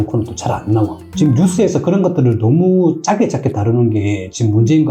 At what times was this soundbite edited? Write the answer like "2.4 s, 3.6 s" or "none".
1.0 s